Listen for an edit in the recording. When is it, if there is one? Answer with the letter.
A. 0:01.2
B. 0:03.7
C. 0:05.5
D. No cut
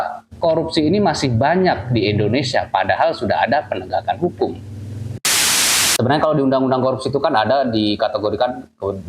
C